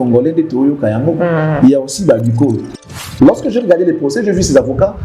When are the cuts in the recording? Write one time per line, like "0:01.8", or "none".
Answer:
0:02.7